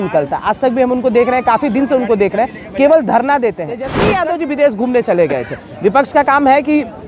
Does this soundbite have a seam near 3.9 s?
yes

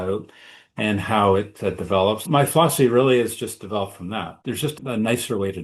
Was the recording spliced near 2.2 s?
yes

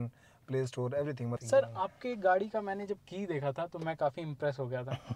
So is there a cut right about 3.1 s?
no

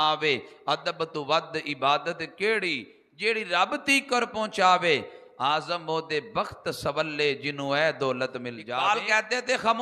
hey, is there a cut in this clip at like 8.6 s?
yes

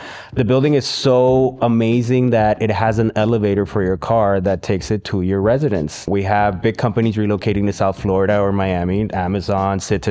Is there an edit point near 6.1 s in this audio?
yes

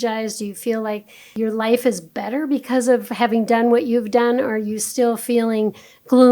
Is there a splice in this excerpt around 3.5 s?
no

